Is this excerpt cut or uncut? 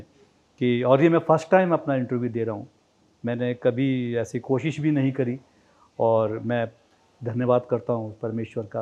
uncut